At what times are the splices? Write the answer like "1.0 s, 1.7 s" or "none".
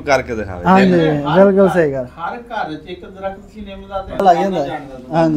4.2 s